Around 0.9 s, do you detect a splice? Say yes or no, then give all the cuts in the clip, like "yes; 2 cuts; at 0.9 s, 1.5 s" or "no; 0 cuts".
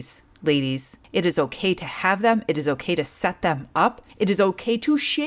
yes; 2 cuts; at 0.9 s, 4.0 s